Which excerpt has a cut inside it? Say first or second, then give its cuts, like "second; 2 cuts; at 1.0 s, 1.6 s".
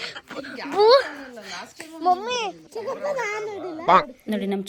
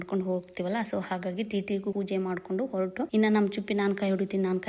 second; 2 cuts; at 1.9 s, 3.1 s